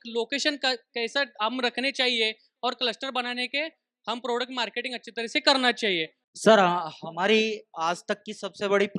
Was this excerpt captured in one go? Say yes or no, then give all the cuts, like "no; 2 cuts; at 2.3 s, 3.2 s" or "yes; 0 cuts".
no; 1 cut; at 6.2 s